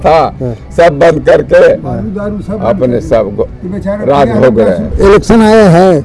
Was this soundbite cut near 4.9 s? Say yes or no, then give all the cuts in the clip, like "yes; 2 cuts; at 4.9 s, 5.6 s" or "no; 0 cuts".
yes; 1 cut; at 4.9 s